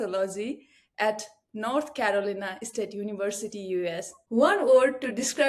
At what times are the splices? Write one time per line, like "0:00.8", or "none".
0:04.1